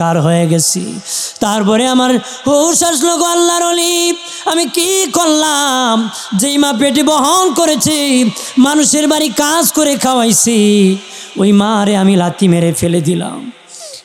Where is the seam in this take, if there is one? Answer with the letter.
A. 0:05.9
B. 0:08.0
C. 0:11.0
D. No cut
D